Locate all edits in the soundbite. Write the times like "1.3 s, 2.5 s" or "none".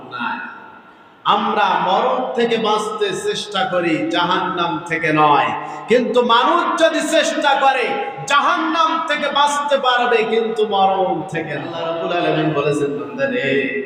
11.8 s